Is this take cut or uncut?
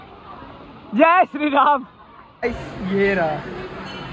cut